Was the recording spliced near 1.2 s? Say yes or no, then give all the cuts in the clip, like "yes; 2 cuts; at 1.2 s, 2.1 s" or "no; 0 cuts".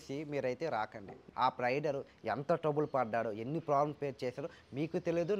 yes; 1 cut; at 1.2 s